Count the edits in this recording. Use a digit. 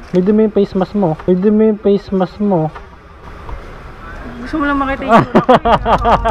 1